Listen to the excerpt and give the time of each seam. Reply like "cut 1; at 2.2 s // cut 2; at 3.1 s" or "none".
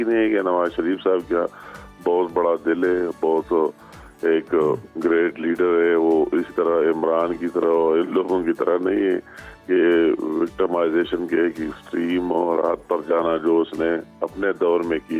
none